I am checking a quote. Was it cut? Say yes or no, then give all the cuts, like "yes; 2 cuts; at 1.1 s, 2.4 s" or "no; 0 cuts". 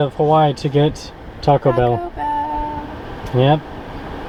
no; 0 cuts